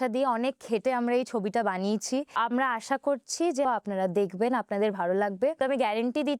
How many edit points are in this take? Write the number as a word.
three